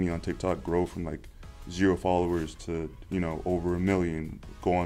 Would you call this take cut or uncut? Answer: uncut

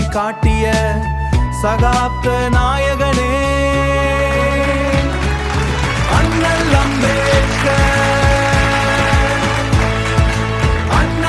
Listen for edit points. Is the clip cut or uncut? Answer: uncut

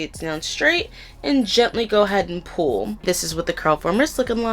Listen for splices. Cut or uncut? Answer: cut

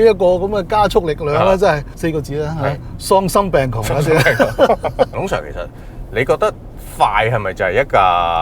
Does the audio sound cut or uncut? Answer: cut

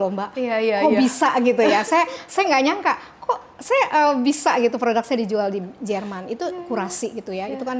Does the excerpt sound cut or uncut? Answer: uncut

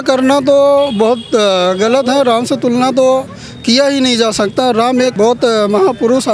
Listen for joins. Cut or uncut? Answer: cut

